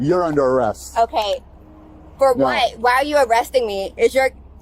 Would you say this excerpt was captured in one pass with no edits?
yes; 0 cuts

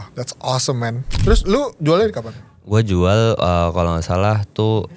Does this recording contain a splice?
yes; 1 cut; at 1.1 s

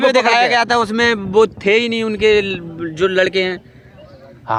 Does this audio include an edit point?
no; 0 cuts

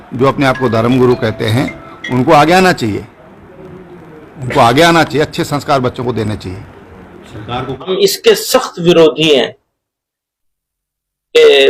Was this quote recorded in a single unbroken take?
no; 1 cut; at 8.2 s

